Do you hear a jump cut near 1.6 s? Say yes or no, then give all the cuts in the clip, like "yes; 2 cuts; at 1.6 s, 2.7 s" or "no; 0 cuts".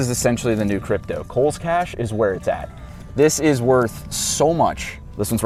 no; 0 cuts